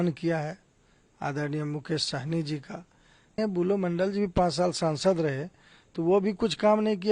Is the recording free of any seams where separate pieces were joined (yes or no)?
no